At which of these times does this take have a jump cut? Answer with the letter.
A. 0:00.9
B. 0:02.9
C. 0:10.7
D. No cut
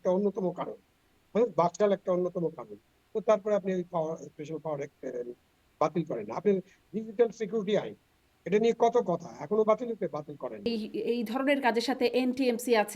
C